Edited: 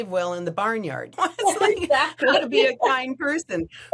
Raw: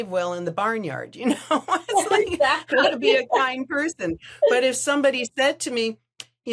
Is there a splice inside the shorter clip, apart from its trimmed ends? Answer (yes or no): yes